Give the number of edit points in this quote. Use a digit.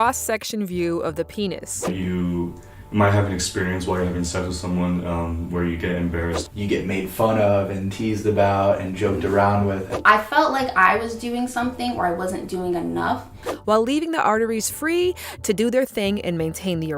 4